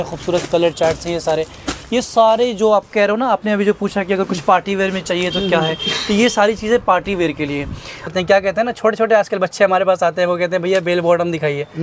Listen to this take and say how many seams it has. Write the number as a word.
one